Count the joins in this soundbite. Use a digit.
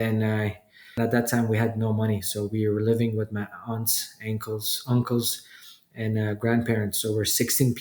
1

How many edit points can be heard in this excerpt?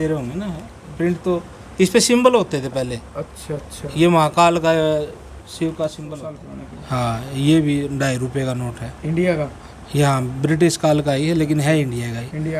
1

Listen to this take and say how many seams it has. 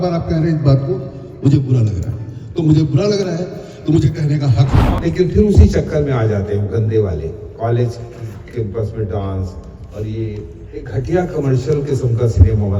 1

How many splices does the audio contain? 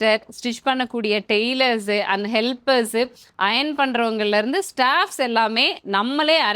0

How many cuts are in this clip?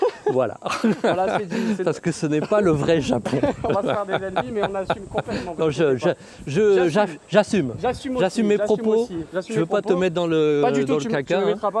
0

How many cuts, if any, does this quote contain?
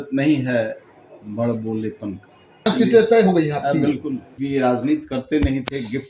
2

